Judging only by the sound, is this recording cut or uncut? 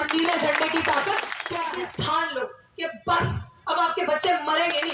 cut